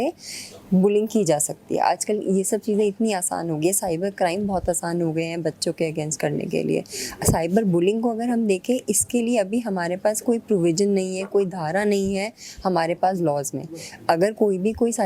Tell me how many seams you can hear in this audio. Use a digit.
0